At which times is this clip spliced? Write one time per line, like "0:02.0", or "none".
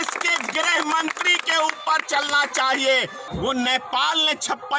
0:03.2